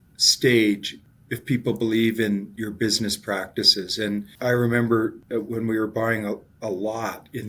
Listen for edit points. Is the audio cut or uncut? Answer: cut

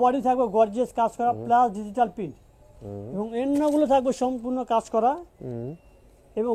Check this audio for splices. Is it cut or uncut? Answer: uncut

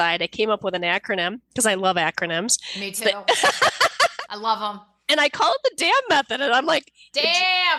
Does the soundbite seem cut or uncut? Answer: uncut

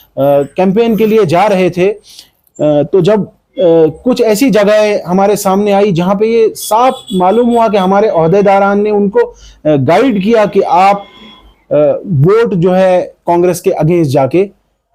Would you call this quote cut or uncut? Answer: uncut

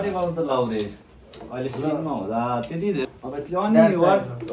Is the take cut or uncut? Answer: cut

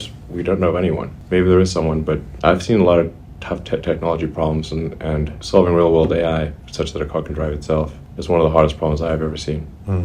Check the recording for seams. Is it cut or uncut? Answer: cut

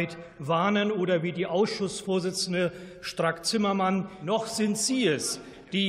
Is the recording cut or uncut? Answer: cut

